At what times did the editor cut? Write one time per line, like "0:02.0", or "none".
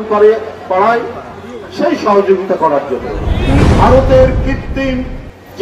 0:03.6